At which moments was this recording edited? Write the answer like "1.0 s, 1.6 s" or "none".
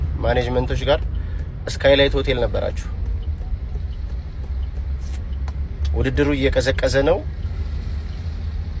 none